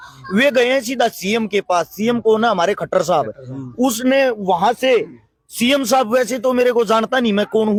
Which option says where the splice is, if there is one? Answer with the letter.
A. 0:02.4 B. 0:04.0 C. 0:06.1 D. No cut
D